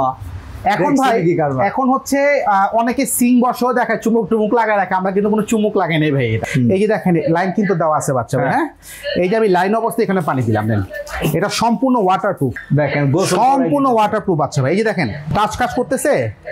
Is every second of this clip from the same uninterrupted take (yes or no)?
no